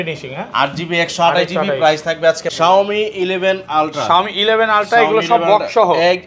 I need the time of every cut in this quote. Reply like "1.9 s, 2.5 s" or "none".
2.5 s